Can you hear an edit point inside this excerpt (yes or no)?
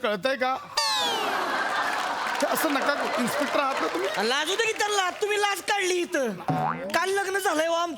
no